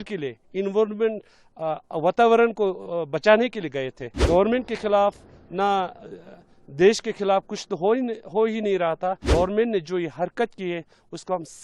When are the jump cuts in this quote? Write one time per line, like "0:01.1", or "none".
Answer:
0:04.2
0:09.2